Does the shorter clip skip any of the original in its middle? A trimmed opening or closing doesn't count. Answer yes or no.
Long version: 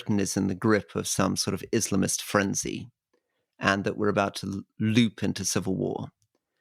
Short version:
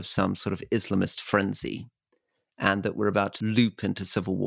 yes